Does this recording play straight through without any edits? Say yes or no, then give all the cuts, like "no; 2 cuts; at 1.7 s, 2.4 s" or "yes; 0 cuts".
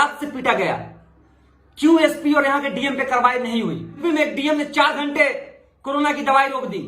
no; 1 cut; at 4.0 s